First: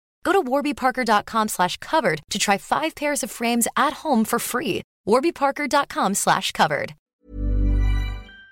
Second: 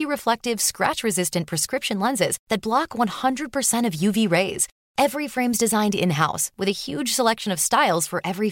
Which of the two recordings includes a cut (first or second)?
first